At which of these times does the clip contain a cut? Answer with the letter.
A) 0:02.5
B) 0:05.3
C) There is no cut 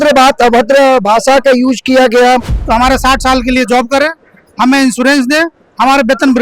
A